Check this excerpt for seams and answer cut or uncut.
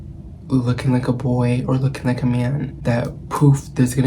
cut